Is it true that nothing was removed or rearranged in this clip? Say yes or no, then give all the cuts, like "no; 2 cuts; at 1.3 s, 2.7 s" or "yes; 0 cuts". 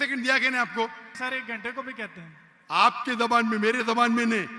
no; 1 cut; at 1.1 s